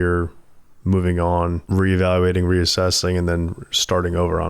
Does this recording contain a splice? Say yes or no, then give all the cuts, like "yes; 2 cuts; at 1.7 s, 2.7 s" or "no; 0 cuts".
yes; 1 cut; at 1.6 s